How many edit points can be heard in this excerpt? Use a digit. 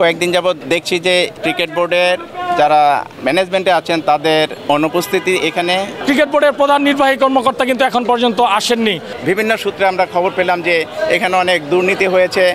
5